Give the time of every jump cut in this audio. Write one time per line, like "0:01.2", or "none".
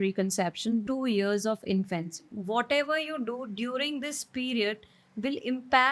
0:00.8
0:02.4